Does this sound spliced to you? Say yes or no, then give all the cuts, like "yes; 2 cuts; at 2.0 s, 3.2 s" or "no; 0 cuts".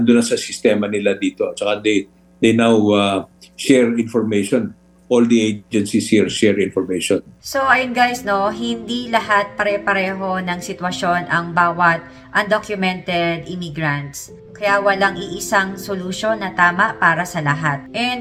no; 0 cuts